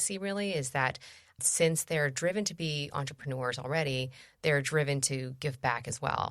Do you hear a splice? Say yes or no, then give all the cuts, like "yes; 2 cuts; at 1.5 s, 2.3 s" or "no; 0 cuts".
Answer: no; 0 cuts